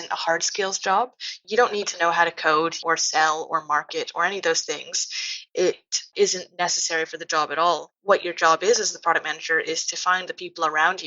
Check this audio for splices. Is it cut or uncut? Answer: cut